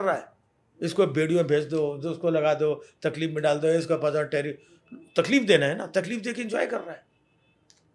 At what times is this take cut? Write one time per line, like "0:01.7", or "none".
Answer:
none